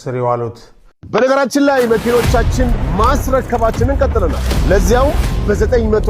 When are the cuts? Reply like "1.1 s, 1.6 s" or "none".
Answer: 0.9 s